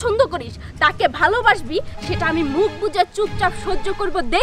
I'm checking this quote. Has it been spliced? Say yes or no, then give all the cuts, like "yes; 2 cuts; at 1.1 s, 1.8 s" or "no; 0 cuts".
no; 0 cuts